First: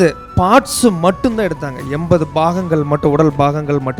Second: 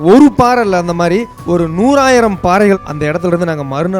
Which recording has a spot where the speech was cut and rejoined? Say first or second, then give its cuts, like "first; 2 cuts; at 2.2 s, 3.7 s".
second; 2 cuts; at 1.3 s, 2.8 s